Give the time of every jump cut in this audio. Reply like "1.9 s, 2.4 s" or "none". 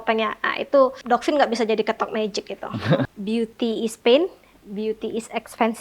1.0 s, 3.2 s